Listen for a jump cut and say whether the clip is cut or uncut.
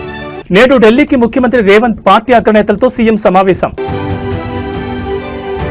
uncut